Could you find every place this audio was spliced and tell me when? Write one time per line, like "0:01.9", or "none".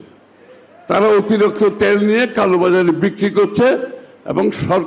none